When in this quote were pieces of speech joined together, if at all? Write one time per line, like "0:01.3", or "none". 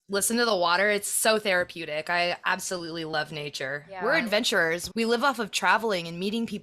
0:03.8
0:04.8